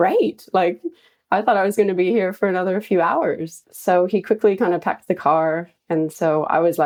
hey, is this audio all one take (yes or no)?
yes